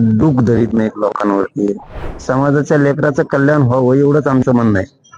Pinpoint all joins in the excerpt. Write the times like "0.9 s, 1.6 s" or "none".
2.1 s